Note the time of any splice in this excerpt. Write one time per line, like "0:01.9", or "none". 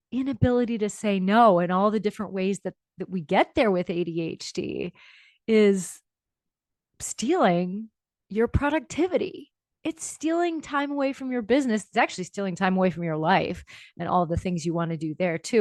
none